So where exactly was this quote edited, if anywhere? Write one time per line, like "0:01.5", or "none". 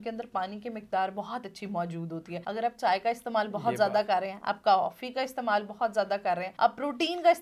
0:02.4
0:06.5